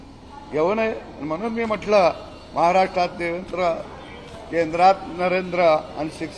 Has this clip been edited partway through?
no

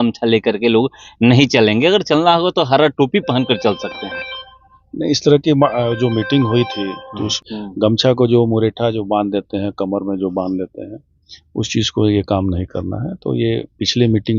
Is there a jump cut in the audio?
yes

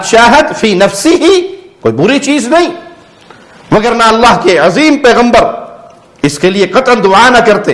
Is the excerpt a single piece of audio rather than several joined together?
yes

